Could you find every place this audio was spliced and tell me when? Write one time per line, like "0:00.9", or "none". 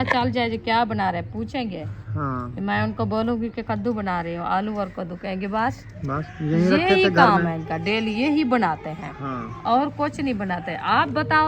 none